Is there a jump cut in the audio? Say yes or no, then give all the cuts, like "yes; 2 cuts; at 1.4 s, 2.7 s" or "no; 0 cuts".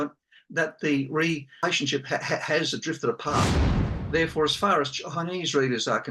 yes; 2 cuts; at 1.6 s, 3.8 s